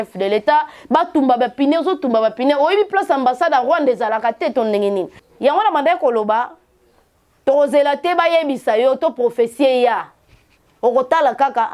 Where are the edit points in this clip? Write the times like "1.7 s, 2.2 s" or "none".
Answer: 5.2 s